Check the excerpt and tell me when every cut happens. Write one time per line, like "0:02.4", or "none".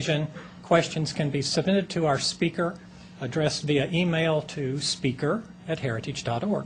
0:01.8